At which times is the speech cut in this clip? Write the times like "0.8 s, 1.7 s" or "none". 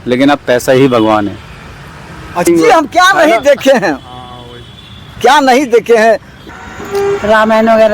2.5 s, 6.3 s